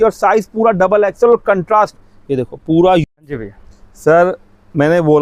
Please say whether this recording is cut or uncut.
cut